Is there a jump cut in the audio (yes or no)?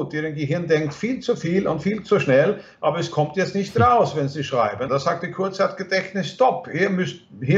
yes